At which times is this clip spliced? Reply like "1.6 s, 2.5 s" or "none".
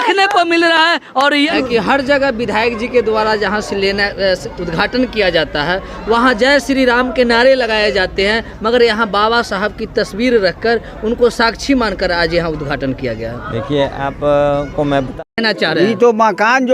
1.5 s, 15.1 s